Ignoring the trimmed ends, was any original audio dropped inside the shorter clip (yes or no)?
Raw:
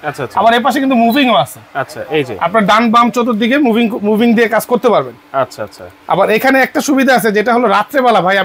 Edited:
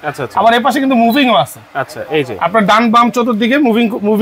no